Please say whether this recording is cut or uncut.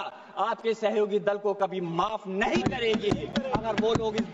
uncut